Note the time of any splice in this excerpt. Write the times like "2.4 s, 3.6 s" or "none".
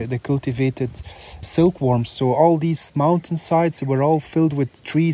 1.5 s